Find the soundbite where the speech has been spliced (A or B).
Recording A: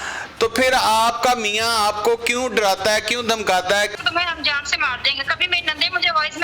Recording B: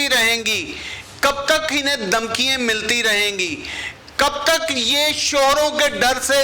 A